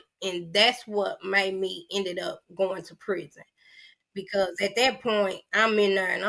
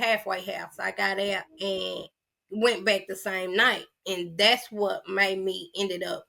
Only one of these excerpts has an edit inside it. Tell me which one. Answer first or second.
second